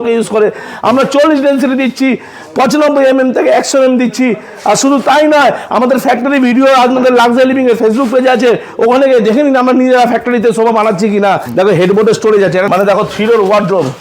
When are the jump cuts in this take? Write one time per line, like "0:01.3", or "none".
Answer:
0:11.5
0:12.7